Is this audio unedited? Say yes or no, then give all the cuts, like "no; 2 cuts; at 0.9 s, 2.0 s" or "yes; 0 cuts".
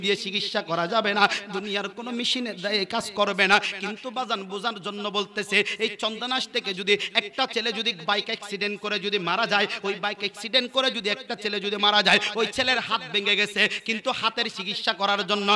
yes; 0 cuts